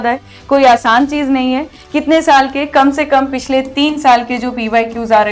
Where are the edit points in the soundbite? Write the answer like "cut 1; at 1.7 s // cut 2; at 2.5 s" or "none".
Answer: cut 1; at 1.7 s